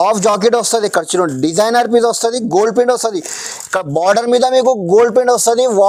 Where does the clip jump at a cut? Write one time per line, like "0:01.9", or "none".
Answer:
none